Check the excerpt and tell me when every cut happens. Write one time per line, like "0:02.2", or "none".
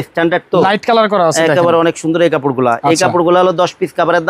none

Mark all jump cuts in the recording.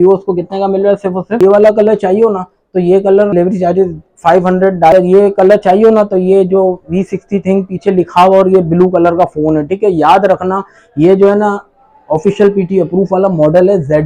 0:01.4
0:03.3
0:04.9

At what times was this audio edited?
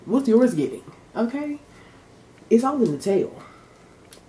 none

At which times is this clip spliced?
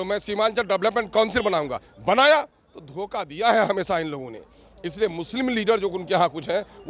none

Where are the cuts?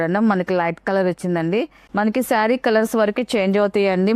0:01.8

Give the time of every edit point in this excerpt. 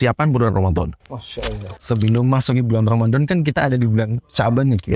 0:01.8

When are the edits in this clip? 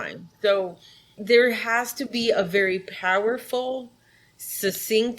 0:01.2

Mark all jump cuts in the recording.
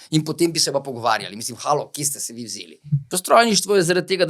0:03.1

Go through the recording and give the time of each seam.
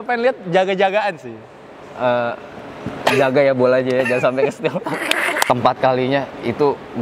0:05.4

